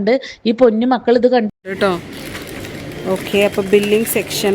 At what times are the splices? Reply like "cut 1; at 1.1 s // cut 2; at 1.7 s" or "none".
cut 1; at 1.6 s